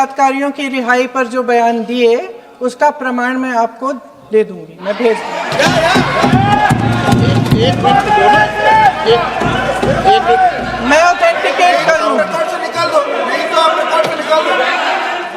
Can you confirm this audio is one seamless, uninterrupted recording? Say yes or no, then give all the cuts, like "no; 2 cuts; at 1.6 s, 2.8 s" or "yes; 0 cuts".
yes; 0 cuts